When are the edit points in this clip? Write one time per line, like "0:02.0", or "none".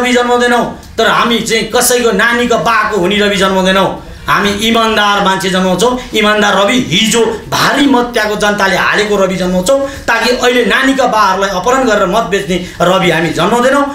none

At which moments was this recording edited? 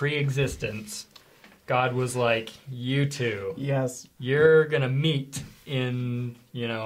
none

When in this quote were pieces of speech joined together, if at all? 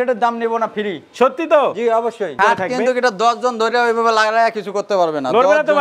0:02.3

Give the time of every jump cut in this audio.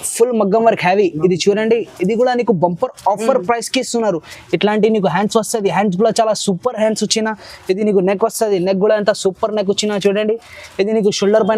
none

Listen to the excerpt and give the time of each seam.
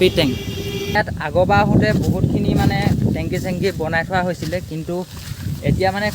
0:00.9

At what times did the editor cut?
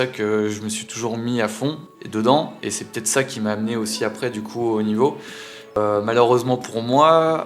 0:05.8

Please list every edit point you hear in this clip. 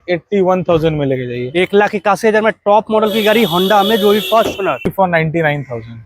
0:04.9

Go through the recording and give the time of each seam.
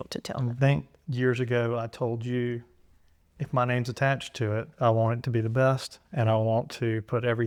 none

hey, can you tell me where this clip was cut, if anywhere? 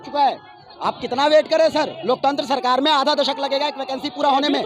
none

